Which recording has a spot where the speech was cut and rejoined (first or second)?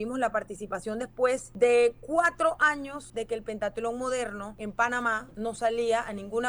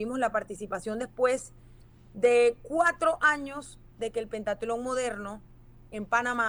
first